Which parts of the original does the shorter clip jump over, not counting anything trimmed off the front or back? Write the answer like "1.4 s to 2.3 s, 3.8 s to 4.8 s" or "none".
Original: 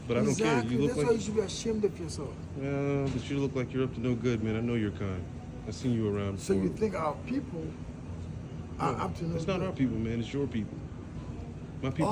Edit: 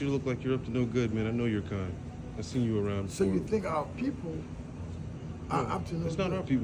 none